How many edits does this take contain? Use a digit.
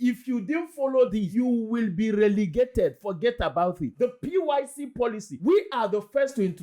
2